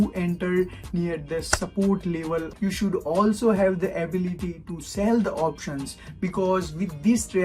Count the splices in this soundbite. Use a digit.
1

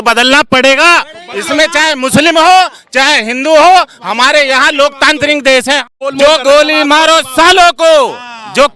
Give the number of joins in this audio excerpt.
1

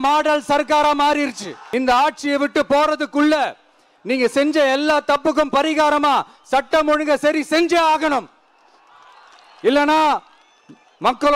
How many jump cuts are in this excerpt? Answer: 1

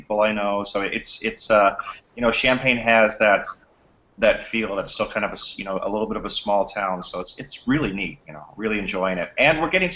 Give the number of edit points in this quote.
1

